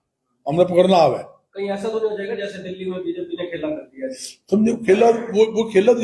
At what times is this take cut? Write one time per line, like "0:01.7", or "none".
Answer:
none